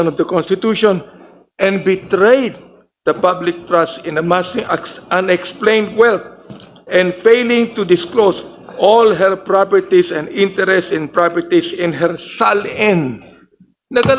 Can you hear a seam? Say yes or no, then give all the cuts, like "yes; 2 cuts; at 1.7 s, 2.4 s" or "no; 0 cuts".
no; 0 cuts